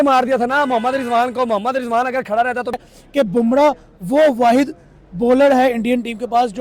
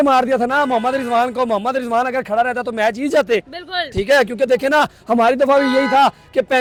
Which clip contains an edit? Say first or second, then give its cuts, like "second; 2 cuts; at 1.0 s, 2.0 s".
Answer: first; 1 cut; at 2.8 s